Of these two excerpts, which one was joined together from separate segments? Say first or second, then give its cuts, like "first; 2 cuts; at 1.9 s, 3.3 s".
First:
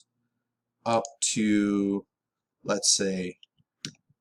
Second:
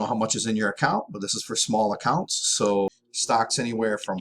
second; 1 cut; at 3.1 s